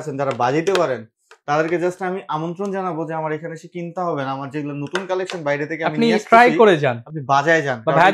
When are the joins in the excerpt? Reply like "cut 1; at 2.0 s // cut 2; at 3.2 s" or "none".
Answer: none